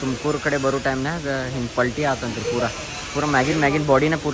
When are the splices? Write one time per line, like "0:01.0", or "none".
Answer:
none